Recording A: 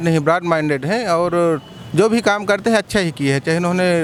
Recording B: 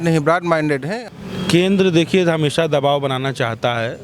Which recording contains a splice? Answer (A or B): B